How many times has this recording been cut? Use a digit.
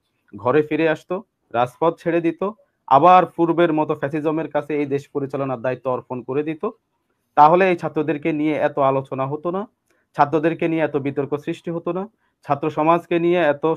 0